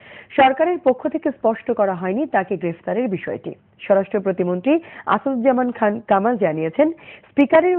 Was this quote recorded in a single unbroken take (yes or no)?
no